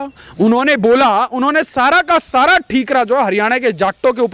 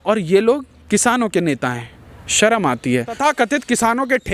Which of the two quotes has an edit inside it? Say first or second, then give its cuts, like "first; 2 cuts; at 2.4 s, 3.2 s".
second; 1 cut; at 3.2 s